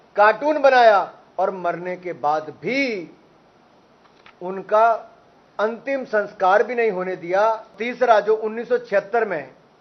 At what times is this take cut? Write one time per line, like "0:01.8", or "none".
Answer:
0:07.8